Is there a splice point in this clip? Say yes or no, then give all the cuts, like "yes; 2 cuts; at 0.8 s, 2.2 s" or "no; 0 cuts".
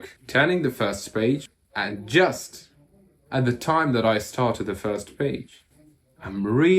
yes; 1 cut; at 1.5 s